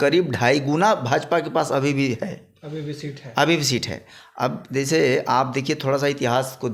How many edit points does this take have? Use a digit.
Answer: 0